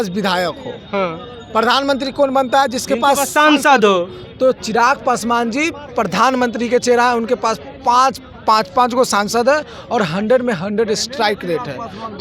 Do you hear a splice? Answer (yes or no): no